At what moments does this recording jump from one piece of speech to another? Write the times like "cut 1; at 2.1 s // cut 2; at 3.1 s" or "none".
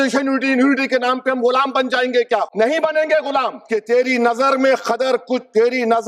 cut 1; at 2.5 s // cut 2; at 3.6 s

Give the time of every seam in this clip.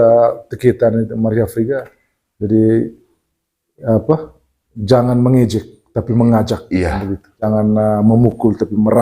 cut 1; at 7.5 s

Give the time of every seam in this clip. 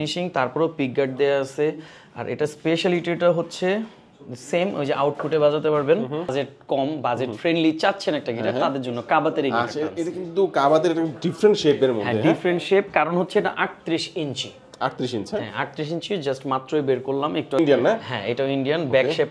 cut 1; at 6.3 s // cut 2; at 17.6 s

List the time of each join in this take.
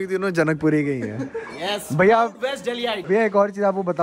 cut 1; at 3.0 s

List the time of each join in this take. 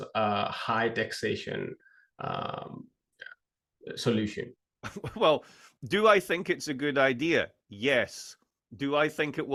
none

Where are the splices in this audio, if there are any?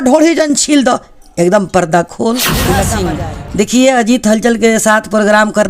cut 1; at 2.9 s

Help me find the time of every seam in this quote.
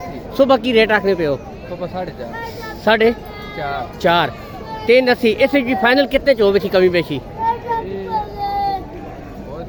none

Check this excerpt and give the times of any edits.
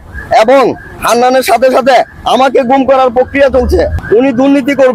cut 1; at 4.0 s

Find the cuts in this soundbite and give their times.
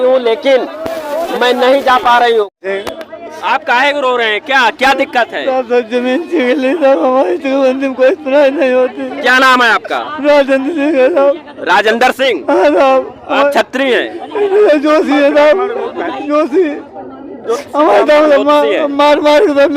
cut 1; at 2.5 s

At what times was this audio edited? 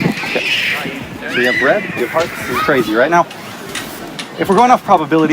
cut 1; at 1.1 s

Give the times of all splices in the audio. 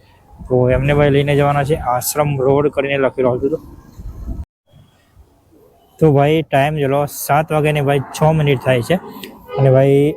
cut 1; at 4.4 s

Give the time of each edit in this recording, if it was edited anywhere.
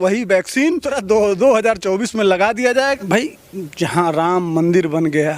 cut 1; at 1.0 s // cut 2; at 3.0 s

